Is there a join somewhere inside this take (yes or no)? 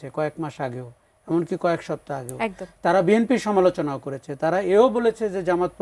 no